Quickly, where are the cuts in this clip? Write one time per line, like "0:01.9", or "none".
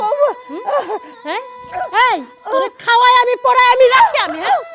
0:01.1